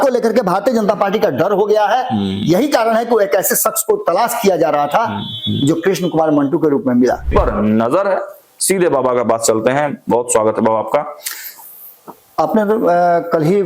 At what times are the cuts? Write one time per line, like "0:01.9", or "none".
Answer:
0:07.3